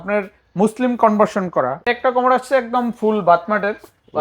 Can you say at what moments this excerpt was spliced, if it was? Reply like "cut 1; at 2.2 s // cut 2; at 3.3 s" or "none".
cut 1; at 1.8 s

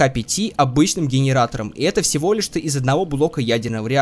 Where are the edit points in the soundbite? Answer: none

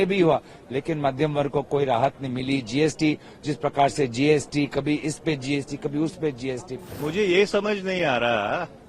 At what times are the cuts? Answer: cut 1; at 6.8 s

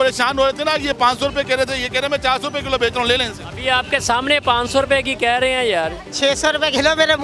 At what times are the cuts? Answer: cut 1; at 6.0 s

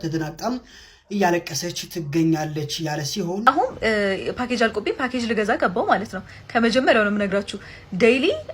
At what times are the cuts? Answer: cut 1; at 3.5 s

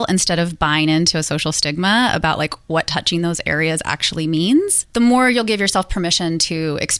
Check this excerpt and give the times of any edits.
cut 1; at 4.8 s

